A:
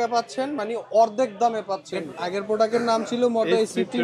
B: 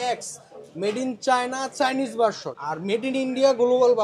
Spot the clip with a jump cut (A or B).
A